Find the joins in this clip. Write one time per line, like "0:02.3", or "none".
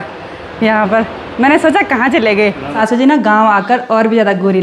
0:02.7

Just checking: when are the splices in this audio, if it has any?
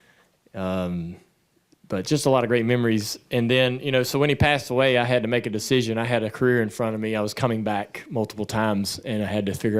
none

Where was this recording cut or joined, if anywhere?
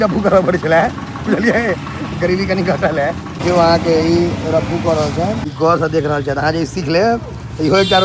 0:03.3
0:05.5

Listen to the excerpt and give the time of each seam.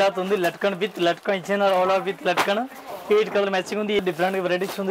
0:04.0

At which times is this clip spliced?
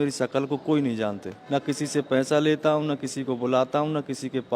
0:01.3

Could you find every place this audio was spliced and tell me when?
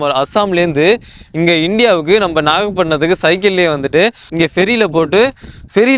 0:04.2

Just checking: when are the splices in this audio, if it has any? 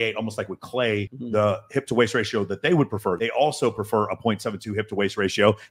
0:01.2
0:03.2

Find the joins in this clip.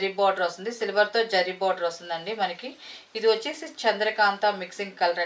none

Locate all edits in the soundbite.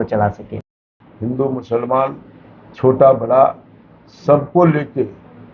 0:00.9

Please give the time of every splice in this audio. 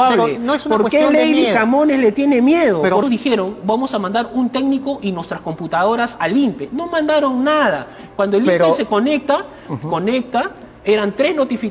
0:03.0

